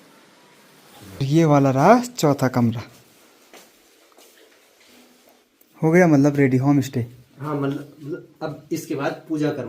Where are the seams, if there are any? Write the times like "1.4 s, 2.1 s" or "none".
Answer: 1.2 s